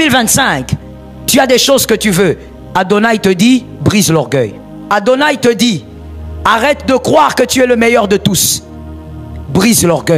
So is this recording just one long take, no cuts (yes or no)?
no